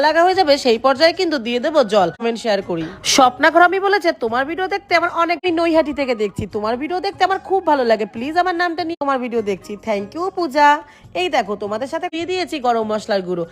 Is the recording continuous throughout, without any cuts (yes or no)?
no